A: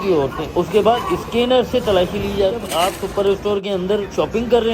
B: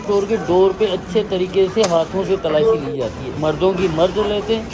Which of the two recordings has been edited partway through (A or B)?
A